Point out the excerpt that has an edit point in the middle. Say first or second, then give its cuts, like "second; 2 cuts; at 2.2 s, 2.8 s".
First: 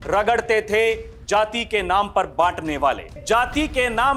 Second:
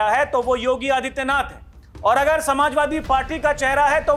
first; 1 cut; at 3.2 s